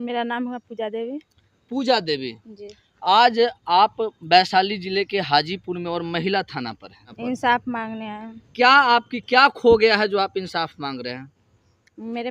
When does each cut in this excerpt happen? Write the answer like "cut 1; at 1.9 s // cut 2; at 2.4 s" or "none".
cut 1; at 7.1 s